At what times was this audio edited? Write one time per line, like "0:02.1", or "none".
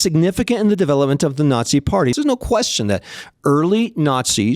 0:02.1